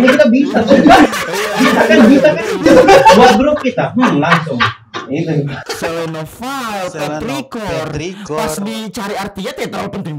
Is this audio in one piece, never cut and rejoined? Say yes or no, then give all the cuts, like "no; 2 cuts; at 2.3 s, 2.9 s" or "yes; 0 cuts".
no; 1 cut; at 5.7 s